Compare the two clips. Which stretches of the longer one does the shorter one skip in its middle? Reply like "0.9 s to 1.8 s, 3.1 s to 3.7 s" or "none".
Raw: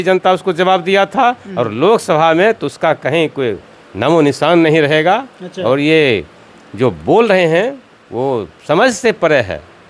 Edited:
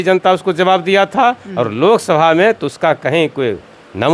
none